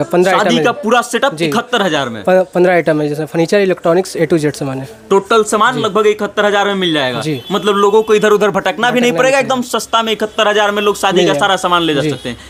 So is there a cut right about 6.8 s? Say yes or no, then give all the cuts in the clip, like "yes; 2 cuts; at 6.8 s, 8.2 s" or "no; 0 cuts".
no; 0 cuts